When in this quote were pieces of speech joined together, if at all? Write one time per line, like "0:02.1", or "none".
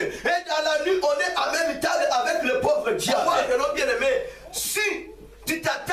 0:03.3